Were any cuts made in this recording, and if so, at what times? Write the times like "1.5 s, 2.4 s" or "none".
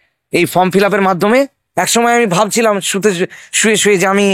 1.6 s